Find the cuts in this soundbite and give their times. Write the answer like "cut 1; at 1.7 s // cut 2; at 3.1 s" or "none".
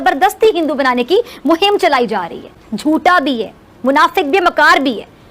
cut 1; at 2.6 s